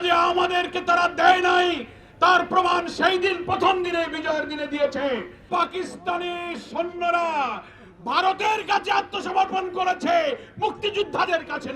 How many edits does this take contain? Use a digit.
1